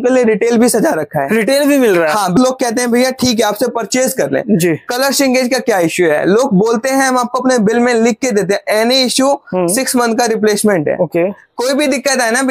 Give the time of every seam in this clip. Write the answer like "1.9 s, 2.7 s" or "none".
2.3 s